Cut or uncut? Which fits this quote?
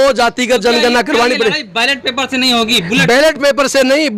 uncut